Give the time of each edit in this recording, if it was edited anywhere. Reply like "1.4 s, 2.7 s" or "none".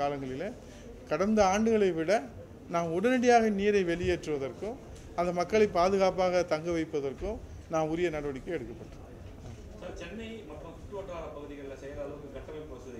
none